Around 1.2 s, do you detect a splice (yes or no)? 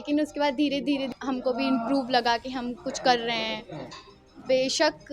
yes